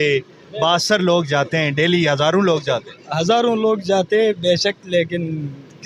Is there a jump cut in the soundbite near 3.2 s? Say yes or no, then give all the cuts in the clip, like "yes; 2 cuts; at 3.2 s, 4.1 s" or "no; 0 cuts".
no; 0 cuts